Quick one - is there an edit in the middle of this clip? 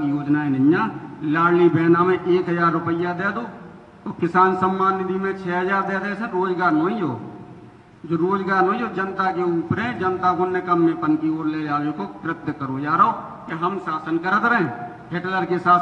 no; 0 cuts

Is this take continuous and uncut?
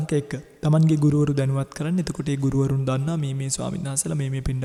yes; 0 cuts

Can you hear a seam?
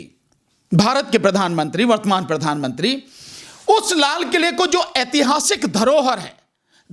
no; 0 cuts

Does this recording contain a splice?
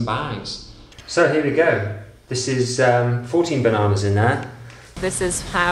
yes; 2 cuts; at 1.0 s, 5.0 s

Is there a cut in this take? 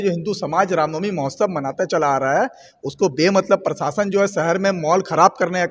no; 0 cuts

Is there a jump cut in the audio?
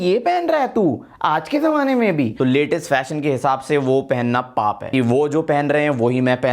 yes; 2 cuts; at 2.3 s, 4.9 s

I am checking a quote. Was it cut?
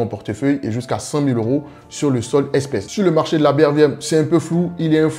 yes; 1 cut; at 2.9 s

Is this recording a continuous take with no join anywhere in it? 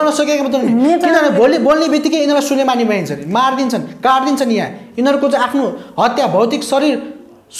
yes; 0 cuts

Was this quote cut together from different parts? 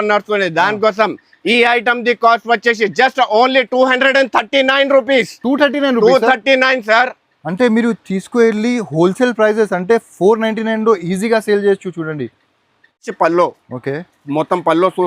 yes; 1 cut; at 13.1 s

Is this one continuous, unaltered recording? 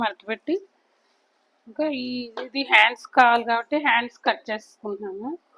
yes; 0 cuts

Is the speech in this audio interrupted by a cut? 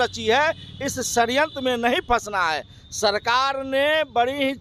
no; 0 cuts

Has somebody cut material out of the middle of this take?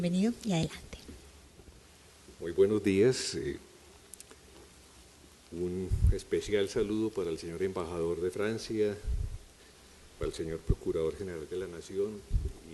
yes; 1 cut; at 4.7 s

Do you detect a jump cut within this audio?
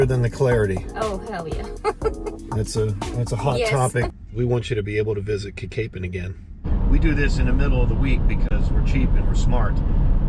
yes; 2 cuts; at 4.1 s, 6.7 s

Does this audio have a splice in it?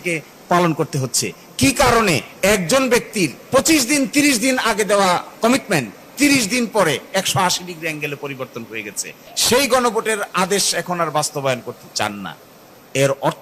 yes; 4 cuts; at 2.3 s, 3.4 s, 5.3 s, 9.3 s

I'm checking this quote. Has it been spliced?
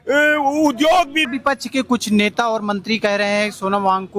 yes; 1 cut; at 1.2 s

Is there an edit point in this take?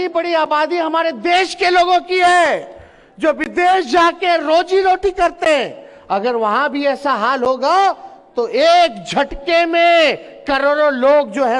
no; 0 cuts

